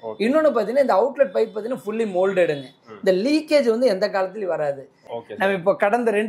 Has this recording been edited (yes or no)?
yes